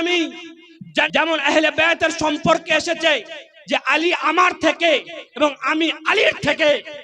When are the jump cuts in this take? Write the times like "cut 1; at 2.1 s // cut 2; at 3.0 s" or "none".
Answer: cut 1; at 1.1 s